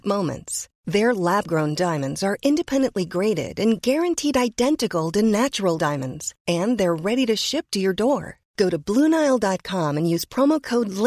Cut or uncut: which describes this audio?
uncut